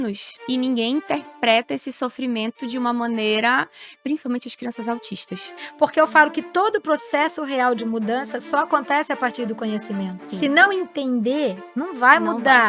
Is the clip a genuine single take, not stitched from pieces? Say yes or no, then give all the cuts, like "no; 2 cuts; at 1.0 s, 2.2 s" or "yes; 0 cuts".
no; 1 cut; at 5.6 s